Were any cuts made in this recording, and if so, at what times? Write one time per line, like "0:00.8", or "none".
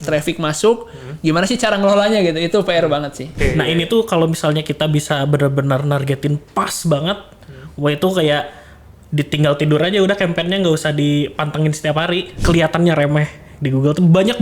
0:03.2
0:12.3